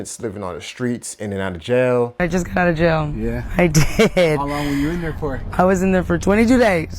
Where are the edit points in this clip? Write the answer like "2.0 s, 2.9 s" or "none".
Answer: 2.2 s

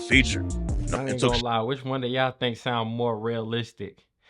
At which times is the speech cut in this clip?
1.0 s

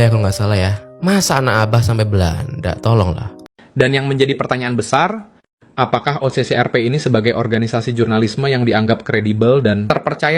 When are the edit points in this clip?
3.3 s

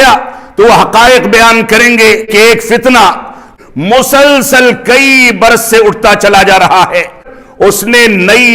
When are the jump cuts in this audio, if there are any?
2.3 s, 3.4 s, 7.3 s

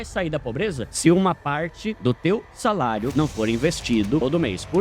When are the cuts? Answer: none

